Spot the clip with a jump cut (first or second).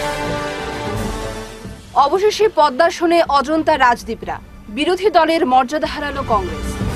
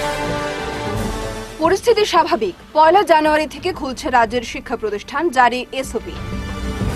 second